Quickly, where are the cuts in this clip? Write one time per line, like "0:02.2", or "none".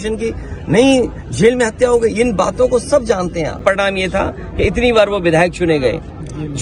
0:03.5